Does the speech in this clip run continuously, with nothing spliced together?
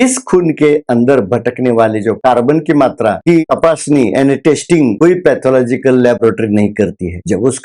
no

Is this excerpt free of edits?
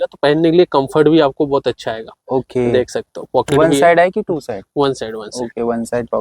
yes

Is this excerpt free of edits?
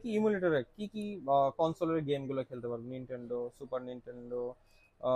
yes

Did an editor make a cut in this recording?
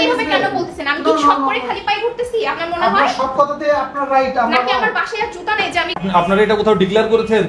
yes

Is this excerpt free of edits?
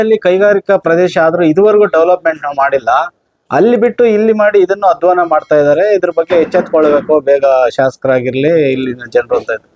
yes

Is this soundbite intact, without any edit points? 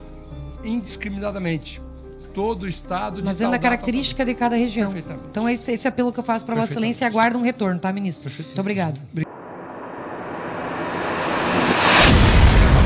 no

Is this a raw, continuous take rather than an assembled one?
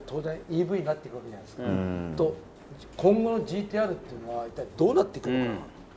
yes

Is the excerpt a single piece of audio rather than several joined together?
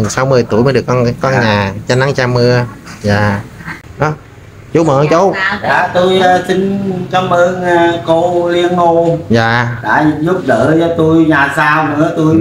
no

